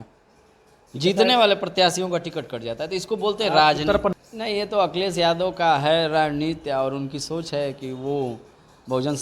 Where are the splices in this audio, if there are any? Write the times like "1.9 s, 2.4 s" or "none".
4.1 s